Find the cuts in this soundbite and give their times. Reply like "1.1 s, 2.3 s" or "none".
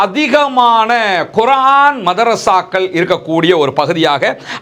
none